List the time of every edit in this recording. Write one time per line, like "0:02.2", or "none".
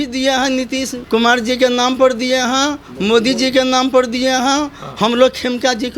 0:01.0